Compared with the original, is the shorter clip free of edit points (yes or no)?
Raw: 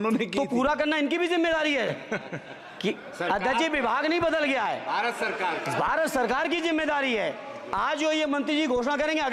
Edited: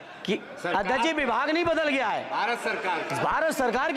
yes